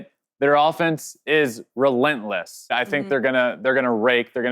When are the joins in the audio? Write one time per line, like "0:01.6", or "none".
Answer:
0:02.7